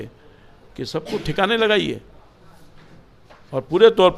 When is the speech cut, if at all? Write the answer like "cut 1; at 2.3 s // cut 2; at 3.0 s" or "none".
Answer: none